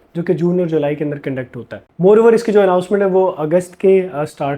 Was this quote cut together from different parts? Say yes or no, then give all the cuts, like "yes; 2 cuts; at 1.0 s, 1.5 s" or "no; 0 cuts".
no; 0 cuts